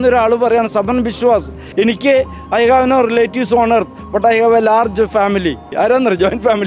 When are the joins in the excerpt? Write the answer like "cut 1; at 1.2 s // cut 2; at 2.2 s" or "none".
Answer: cut 1; at 1.6 s // cut 2; at 5.7 s